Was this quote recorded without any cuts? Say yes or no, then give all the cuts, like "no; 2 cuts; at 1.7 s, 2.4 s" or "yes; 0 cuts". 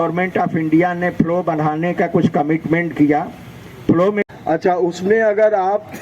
no; 1 cut; at 4.2 s